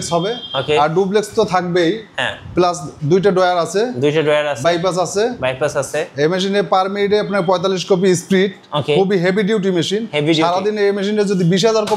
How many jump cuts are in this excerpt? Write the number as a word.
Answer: zero